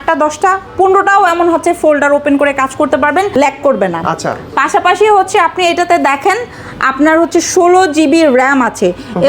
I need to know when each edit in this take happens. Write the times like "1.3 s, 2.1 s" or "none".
none